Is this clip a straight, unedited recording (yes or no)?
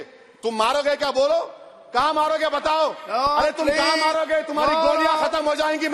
yes